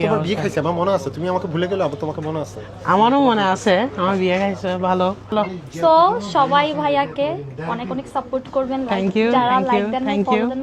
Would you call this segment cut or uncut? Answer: cut